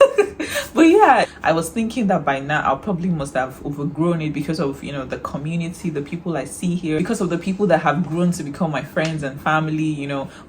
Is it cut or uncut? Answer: cut